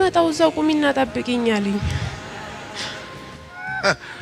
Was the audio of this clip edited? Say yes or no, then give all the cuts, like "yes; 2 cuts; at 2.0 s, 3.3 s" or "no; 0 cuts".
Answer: no; 0 cuts